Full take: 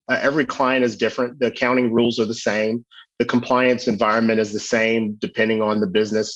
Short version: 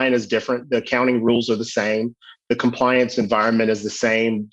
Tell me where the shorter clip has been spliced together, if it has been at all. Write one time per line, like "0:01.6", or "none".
none